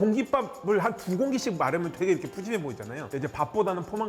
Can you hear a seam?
yes; 1 cut; at 3.0 s

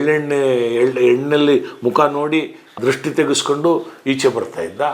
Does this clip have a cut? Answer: yes; 1 cut; at 2.7 s

